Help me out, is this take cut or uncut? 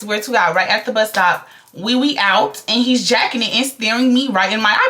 uncut